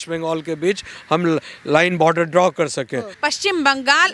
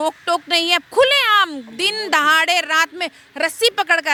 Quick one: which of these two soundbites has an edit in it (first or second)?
first